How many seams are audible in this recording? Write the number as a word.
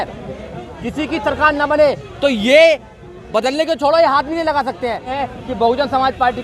one